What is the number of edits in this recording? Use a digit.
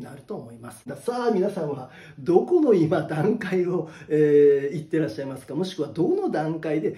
1